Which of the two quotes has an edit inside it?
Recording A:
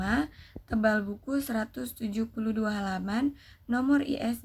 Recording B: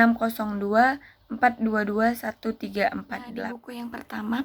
B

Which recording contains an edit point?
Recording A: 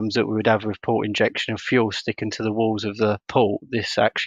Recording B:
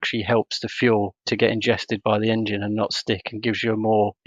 A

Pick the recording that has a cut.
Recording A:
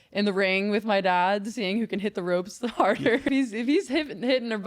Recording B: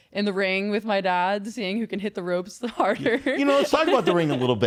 A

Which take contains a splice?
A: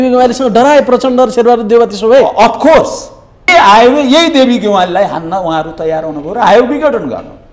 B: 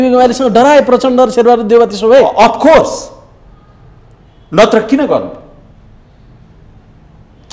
A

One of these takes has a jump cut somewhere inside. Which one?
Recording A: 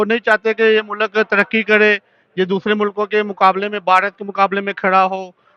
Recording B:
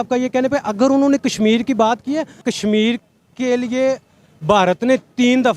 B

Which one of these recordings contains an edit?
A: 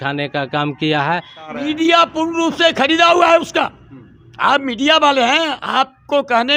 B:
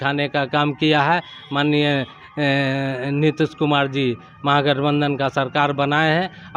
A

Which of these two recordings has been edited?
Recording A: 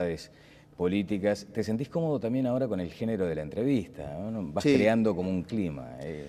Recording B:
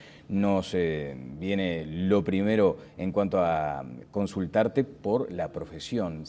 B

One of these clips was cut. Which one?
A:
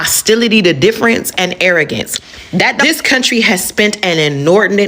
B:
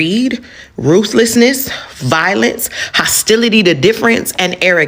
A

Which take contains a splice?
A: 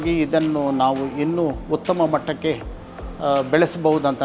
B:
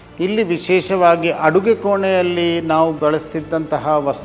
B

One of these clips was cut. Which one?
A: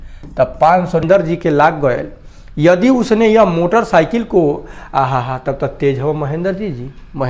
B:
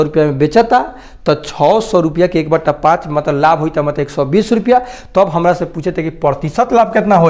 A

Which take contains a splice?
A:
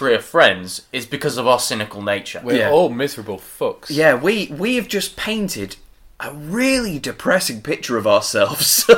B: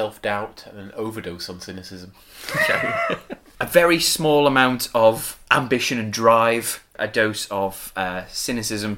B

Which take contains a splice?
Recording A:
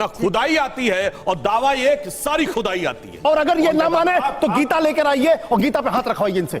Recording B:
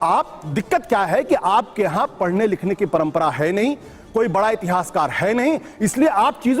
A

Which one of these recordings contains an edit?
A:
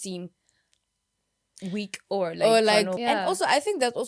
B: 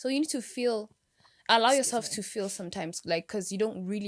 A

